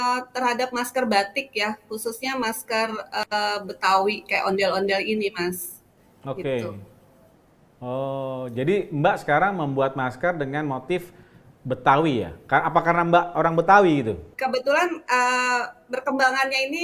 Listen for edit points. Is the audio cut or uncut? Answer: uncut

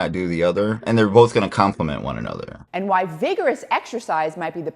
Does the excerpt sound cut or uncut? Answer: cut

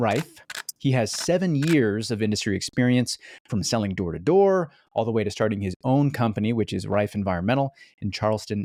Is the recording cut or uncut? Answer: uncut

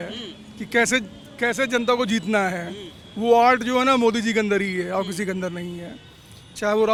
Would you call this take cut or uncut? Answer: uncut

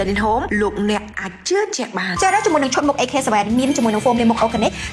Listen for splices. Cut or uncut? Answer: cut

